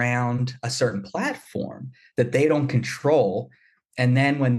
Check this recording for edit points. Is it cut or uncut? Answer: uncut